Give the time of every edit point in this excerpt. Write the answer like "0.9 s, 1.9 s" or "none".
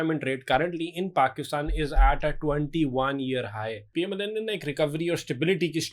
3.9 s